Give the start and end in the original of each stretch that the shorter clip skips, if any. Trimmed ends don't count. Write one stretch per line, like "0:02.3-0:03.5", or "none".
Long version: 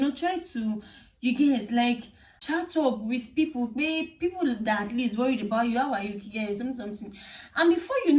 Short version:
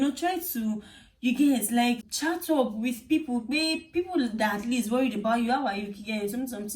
0:02.1-0:02.4